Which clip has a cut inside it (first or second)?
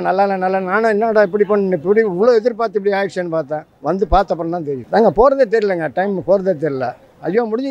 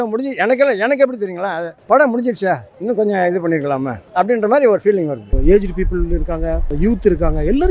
second